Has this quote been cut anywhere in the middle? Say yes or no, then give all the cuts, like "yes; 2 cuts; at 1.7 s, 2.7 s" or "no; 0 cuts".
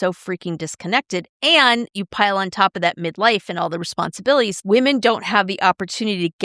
yes; 1 cut; at 4.6 s